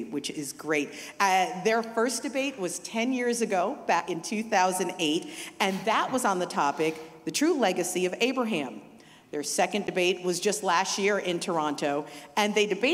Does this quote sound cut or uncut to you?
cut